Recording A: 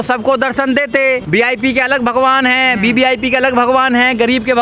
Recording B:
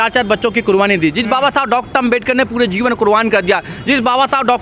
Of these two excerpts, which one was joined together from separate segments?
A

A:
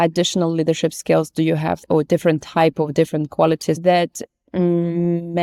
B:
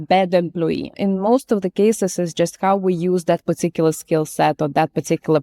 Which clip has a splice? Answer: B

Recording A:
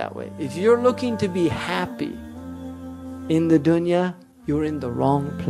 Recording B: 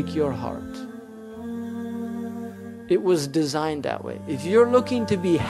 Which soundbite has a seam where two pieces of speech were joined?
A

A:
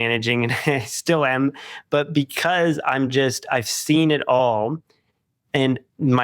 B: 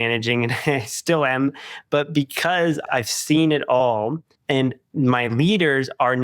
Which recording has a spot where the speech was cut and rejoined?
B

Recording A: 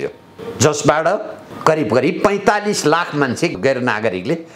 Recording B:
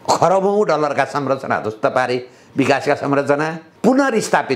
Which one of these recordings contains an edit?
B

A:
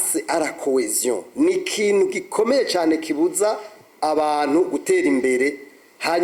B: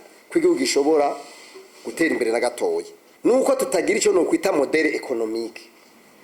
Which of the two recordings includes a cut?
B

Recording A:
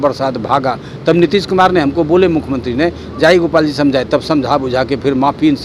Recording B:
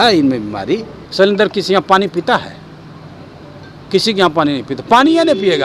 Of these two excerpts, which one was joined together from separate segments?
B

